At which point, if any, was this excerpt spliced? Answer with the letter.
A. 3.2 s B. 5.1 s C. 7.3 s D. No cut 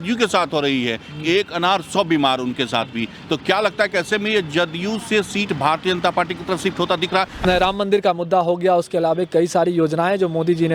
C